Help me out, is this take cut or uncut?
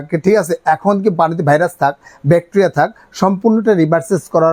uncut